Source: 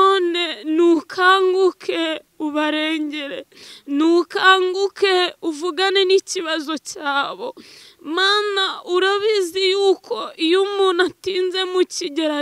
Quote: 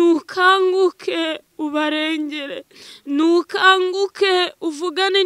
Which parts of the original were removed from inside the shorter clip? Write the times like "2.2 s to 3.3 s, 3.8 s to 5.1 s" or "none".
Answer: none